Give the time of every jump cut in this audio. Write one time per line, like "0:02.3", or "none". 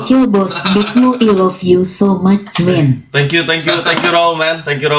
none